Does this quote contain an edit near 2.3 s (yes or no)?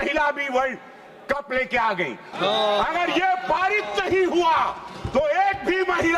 yes